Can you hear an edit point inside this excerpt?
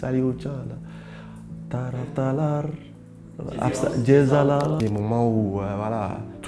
yes; 1 cut; at 4.8 s

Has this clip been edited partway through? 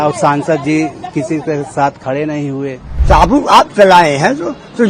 yes; 1 cut; at 2.9 s

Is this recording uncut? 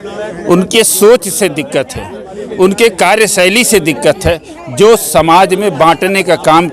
yes; 0 cuts

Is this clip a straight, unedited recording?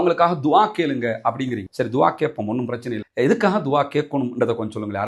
yes; 0 cuts

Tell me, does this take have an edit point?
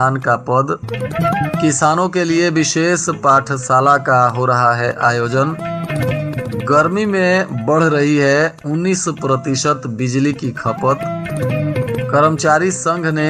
no; 0 cuts

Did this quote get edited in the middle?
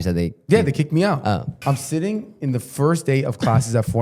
yes; 1 cut; at 1.5 s

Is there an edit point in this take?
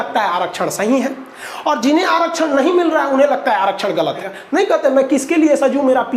yes; 1 cut; at 4.3 s

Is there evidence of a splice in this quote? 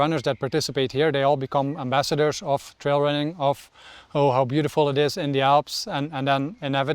no; 0 cuts

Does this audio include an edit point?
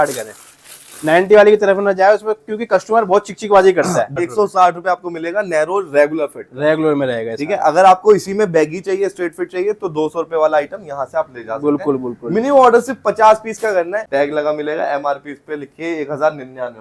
yes; 2 cuts; at 4.1 s, 14.0 s

